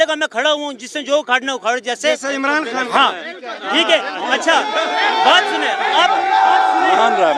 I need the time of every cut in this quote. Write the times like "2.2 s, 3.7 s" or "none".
none